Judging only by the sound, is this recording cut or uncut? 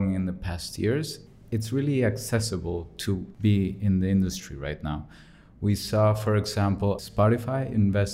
cut